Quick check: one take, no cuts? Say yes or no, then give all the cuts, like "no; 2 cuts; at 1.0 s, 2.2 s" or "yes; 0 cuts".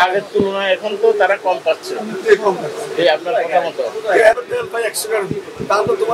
no; 1 cut; at 4.3 s